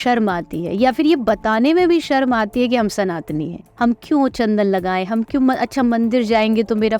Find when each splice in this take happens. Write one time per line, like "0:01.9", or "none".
0:03.6

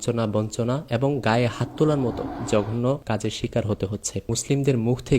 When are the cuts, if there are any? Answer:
0:02.3
0:03.0
0:04.3

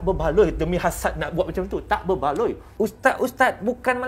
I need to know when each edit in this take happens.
0:02.8

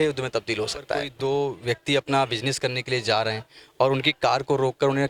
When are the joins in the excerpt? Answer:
0:01.1

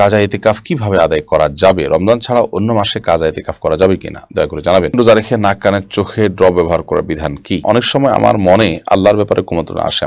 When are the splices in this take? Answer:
0:04.9
0:07.6

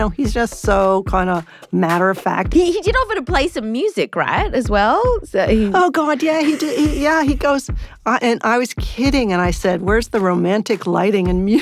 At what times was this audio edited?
0:02.5
0:09.6

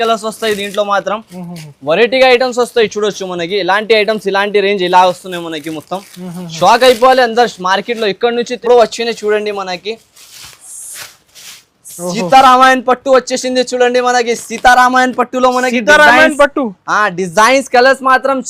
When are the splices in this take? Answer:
0:08.5

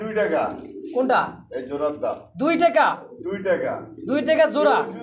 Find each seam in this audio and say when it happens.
none

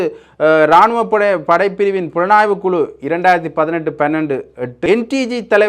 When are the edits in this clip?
0:04.8

